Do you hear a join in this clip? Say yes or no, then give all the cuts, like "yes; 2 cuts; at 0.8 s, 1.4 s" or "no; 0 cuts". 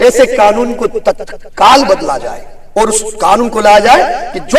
no; 0 cuts